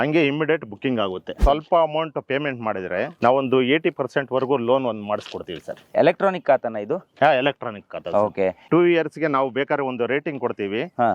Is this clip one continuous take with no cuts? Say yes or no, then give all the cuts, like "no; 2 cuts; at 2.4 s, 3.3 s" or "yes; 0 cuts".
no; 4 cuts; at 1.4 s, 3.1 s, 5.9 s, 8.6 s